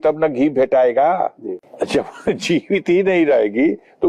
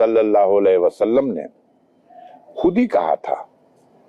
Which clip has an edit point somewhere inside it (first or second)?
first